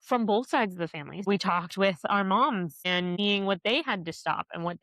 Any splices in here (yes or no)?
yes